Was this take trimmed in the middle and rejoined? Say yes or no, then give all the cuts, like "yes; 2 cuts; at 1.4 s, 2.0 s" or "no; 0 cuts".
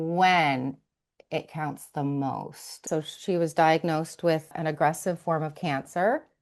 yes; 2 cuts; at 2.8 s, 4.5 s